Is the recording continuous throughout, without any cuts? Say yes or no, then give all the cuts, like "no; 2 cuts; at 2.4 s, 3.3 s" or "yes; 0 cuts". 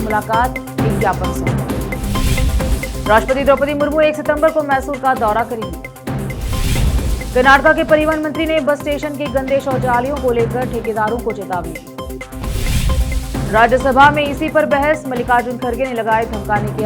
yes; 0 cuts